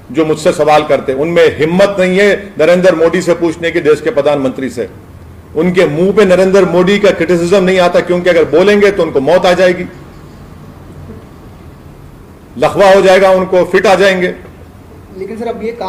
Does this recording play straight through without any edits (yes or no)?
yes